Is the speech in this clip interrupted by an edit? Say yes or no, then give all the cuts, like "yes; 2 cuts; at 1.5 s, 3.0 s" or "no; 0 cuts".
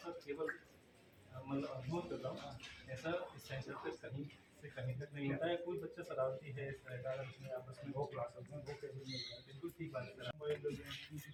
no; 0 cuts